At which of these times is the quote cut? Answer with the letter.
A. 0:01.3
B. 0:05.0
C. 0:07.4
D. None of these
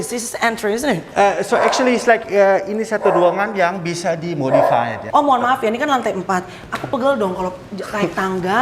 B